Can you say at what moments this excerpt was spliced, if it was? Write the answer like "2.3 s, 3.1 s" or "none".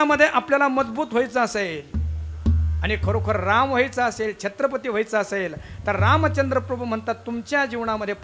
none